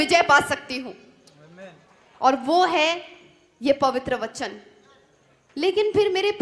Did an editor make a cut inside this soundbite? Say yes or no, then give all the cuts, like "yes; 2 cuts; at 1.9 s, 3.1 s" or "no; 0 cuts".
no; 0 cuts